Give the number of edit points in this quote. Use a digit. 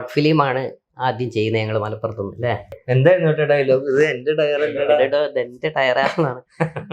1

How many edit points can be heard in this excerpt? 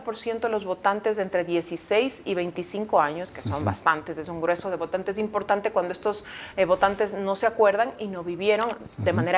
0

